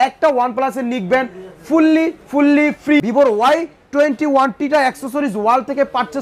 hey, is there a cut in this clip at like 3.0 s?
yes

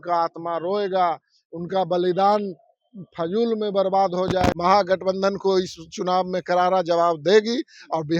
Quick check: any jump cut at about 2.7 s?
no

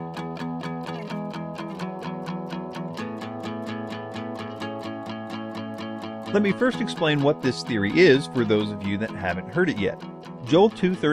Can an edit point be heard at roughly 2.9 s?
yes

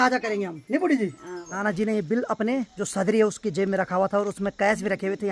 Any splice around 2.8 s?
yes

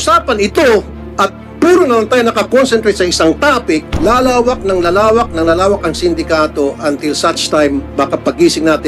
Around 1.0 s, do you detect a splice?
yes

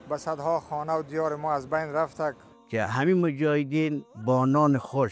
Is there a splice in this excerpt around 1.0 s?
no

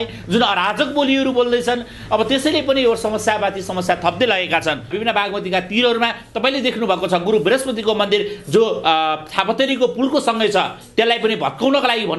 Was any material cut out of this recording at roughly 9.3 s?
no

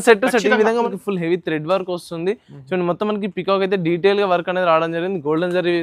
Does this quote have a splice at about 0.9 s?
yes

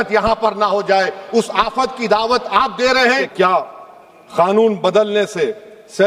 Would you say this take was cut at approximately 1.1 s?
no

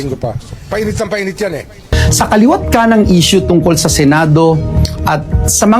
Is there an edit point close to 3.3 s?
no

